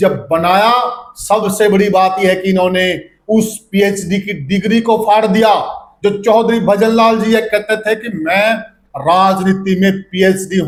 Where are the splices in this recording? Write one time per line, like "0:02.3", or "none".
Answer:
none

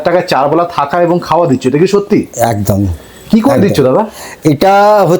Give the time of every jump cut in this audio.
none

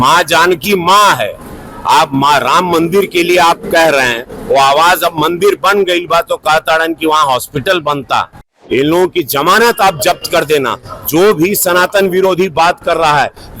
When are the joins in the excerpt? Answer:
0:08.5

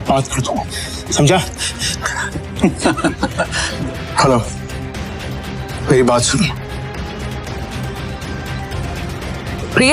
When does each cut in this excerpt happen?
0:03.6
0:07.5

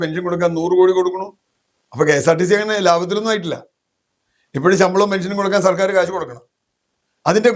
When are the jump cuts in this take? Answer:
none

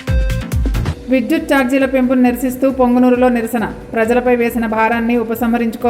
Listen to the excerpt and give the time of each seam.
none

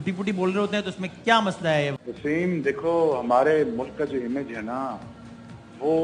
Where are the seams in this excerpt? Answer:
0:02.0

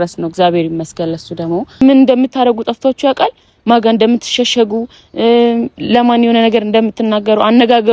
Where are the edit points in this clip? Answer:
0:01.8

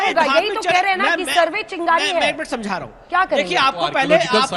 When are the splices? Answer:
none

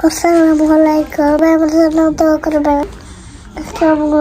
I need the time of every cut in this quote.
0:01.4
0:02.8

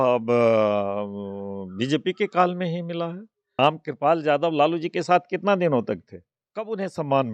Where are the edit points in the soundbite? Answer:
0:03.6

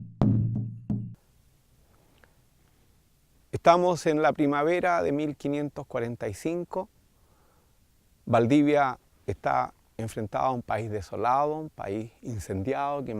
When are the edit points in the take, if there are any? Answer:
0:01.1

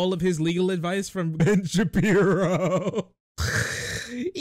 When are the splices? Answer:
0:01.4

